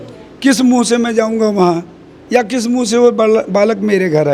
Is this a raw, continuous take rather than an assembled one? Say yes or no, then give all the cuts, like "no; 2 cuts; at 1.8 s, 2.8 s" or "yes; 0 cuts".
yes; 0 cuts